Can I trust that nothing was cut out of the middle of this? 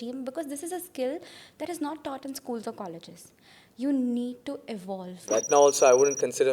no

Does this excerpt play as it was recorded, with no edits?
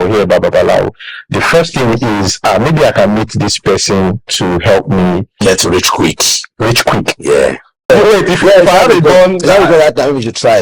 no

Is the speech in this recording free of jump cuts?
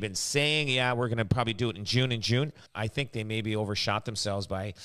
no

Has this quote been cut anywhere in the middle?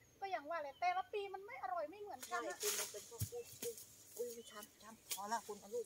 no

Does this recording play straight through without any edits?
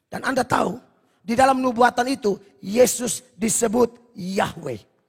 yes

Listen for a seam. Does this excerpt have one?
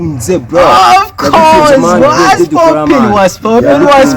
yes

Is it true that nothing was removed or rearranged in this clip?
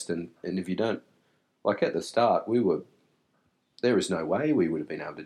yes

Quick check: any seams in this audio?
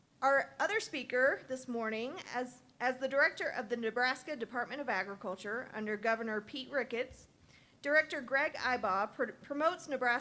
no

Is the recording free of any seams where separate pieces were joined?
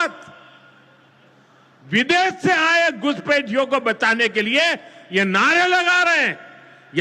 yes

